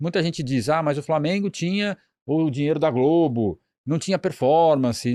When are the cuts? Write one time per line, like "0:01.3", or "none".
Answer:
none